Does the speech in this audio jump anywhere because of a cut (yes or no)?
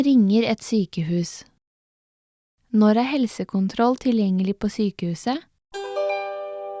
yes